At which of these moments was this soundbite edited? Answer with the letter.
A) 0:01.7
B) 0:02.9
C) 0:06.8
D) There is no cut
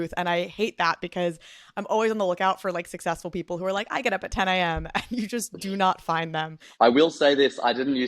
C